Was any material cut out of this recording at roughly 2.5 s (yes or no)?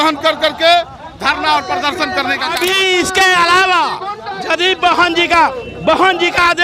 yes